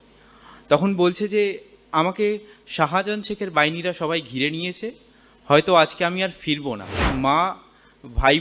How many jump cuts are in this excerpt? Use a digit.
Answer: 1